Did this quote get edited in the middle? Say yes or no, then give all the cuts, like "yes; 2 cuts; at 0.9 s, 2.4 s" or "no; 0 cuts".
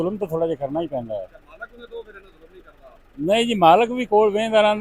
no; 0 cuts